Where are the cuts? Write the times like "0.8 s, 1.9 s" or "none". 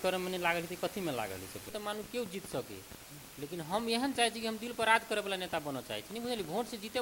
1.7 s